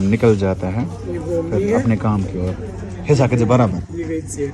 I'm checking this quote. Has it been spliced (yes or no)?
no